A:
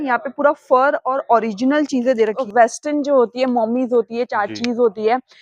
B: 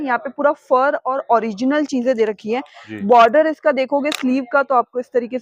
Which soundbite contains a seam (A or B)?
A